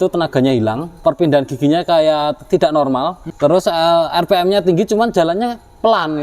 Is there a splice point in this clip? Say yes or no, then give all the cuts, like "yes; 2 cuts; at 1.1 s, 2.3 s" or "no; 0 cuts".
yes; 2 cuts; at 1.0 s, 3.2 s